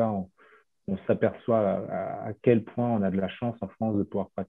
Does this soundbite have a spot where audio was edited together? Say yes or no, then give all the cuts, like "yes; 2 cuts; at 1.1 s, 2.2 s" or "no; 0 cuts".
no; 0 cuts